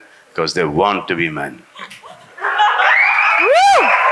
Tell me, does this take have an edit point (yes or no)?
no